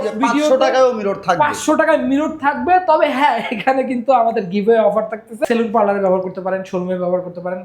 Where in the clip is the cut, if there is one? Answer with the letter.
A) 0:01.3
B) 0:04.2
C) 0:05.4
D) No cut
C